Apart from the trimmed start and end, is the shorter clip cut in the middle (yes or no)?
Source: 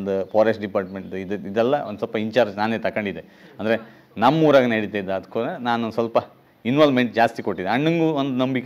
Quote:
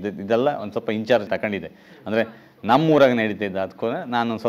yes